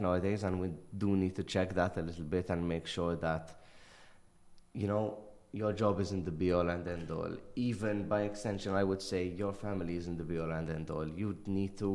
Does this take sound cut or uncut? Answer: uncut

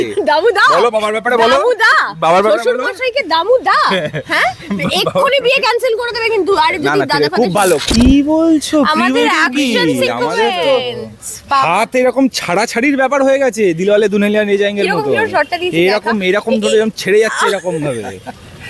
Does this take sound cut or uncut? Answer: cut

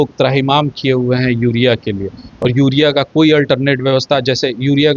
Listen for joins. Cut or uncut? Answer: uncut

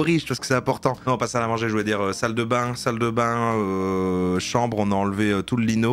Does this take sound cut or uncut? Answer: uncut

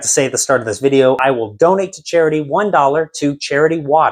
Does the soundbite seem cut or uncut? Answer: cut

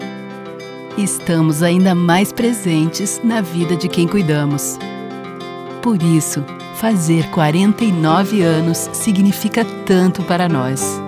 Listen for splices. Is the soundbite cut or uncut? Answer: uncut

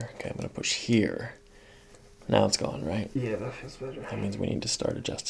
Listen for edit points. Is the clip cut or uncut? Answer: uncut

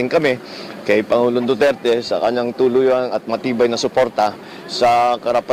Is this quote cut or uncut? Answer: cut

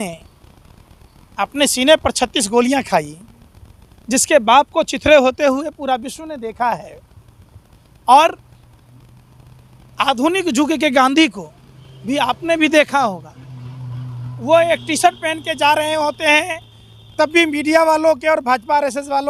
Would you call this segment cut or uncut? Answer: uncut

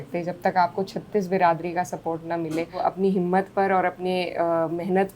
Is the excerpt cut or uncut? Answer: cut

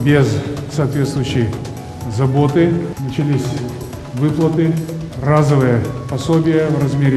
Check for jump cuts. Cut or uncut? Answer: cut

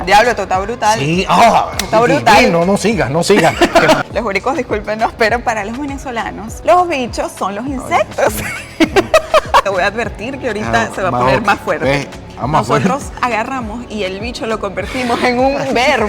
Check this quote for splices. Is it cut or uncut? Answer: cut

